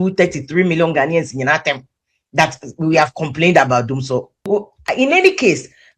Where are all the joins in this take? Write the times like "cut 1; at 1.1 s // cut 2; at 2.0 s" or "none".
cut 1; at 4.5 s